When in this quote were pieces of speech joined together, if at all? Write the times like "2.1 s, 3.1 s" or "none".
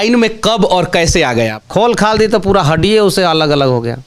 1.6 s